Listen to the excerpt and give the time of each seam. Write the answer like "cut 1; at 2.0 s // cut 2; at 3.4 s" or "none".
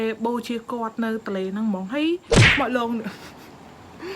cut 1; at 2.4 s